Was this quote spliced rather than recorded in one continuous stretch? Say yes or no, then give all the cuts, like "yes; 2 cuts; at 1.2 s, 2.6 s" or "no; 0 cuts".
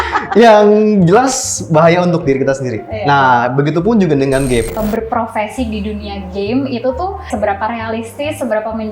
yes; 2 cuts; at 4.7 s, 7.3 s